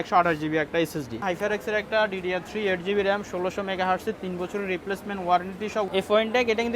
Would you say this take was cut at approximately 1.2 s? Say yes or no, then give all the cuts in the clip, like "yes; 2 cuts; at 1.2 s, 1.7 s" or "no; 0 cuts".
yes; 2 cuts; at 1.2 s, 5.9 s